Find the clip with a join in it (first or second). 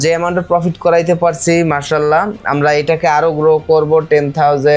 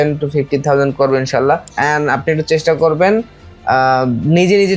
second